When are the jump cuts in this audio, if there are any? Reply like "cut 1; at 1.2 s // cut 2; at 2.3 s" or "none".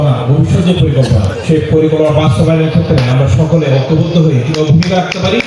cut 1; at 2.3 s